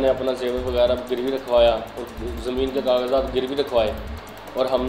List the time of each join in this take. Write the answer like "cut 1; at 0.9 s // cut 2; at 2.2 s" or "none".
none